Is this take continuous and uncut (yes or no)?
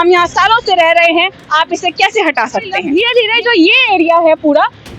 no